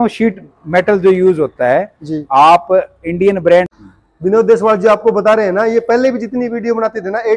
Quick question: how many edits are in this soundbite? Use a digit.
1